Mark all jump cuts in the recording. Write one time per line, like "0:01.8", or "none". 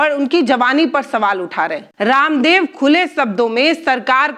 0:01.8